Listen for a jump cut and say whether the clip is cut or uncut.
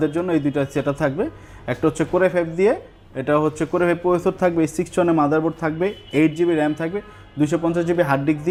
uncut